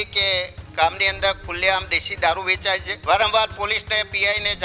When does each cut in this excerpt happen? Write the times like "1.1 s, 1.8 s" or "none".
2.9 s